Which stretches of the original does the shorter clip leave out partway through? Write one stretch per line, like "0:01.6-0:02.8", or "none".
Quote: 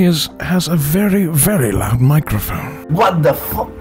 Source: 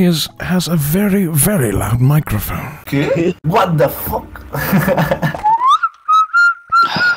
0:02.8-0:03.4

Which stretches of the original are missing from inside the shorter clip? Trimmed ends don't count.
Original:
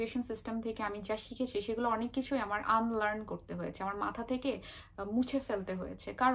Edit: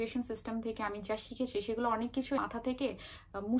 0:02.4-0:04.0

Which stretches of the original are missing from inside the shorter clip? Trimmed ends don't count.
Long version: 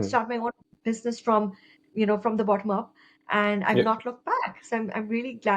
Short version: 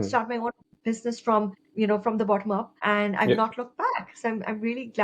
0:01.6-0:01.8
0:02.9-0:03.2

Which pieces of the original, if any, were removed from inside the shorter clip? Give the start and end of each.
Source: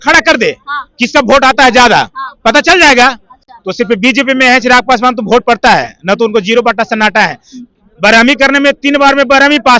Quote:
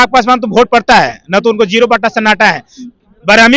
none

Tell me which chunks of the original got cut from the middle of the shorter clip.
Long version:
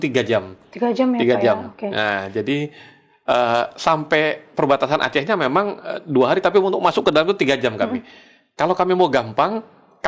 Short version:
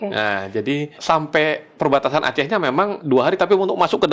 0:02.8-0:03.7
0:05.8-0:06.0

